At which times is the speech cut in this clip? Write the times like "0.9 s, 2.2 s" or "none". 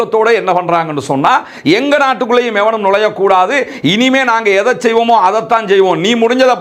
none